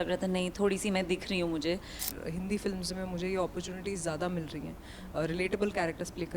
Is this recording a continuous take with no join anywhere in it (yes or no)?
no